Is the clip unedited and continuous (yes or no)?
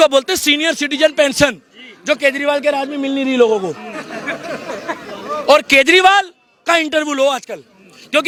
yes